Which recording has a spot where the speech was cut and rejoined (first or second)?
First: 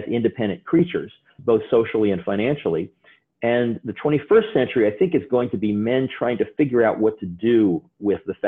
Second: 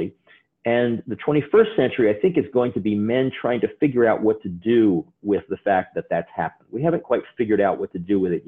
first